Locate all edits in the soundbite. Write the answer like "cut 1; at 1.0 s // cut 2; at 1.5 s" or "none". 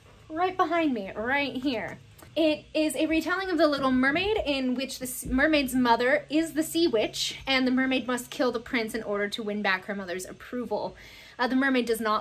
cut 1; at 2.5 s